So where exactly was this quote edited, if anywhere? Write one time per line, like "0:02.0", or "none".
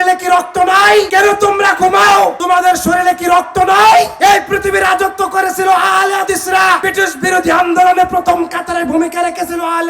0:01.1
0:02.4
0:04.1
0:06.9